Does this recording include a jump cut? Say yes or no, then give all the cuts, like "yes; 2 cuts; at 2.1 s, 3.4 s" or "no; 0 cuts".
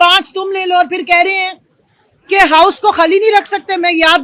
no; 0 cuts